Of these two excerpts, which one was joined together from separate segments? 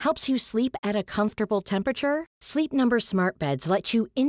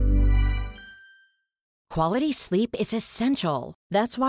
second; 1 cut; at 1.8 s

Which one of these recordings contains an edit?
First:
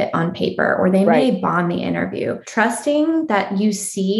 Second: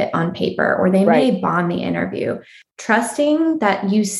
first; 1 cut; at 2.4 s

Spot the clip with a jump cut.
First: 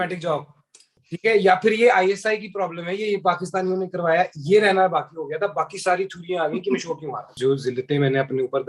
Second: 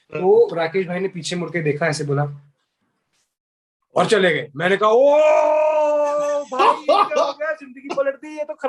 first; 2 cuts; at 1.0 s, 7.3 s

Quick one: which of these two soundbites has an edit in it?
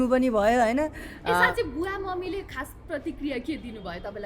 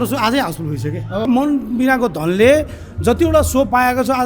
second; 1 cut; at 1.3 s

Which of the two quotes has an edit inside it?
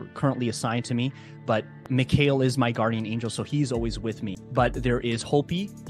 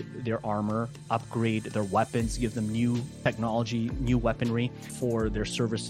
first; 1 cut; at 4.4 s

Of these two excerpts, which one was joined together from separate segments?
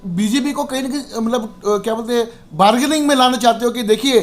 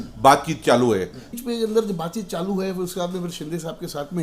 second; 1 cut; at 1.4 s

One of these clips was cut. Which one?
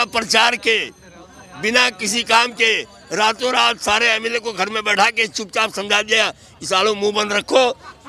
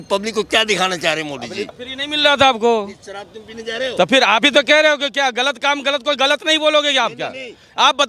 second; 1 cut; at 1.7 s

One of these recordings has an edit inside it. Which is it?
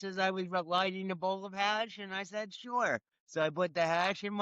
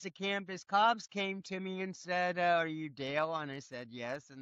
first; 1 cut; at 3.2 s

